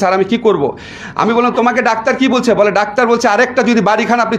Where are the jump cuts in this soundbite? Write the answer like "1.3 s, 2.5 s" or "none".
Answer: none